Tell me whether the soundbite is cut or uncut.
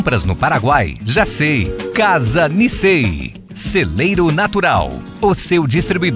uncut